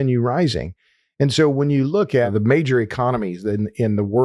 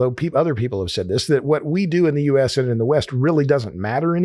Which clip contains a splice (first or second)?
first